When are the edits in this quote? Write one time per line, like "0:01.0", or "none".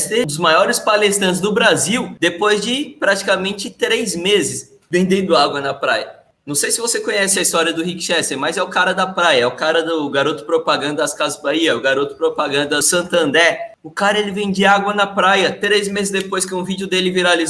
none